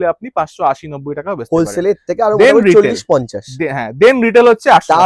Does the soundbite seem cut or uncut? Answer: uncut